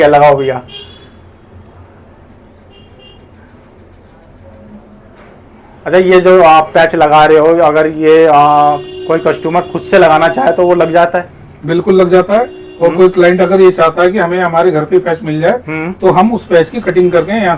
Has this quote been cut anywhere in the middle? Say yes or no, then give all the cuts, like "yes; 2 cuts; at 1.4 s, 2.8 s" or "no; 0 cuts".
no; 0 cuts